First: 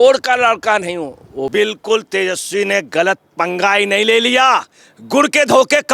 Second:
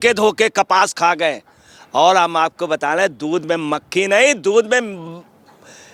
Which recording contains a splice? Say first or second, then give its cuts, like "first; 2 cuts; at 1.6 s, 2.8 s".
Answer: first; 1 cut; at 1.5 s